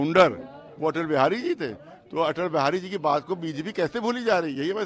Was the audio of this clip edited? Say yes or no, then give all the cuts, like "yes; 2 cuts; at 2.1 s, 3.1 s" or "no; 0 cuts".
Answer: no; 0 cuts